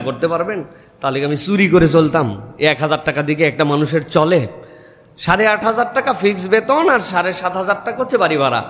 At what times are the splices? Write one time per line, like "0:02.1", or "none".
none